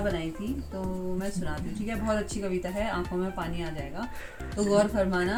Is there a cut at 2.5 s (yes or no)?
no